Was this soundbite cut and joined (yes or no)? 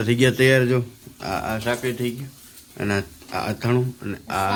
no